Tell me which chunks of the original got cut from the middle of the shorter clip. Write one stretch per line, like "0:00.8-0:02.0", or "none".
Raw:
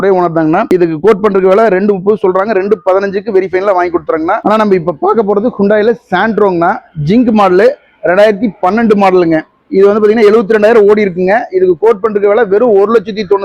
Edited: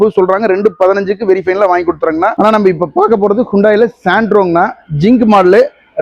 none